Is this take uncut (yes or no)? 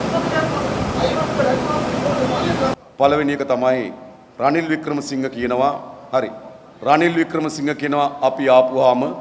yes